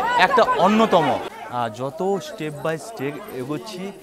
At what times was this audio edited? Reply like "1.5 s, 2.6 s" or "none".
1.3 s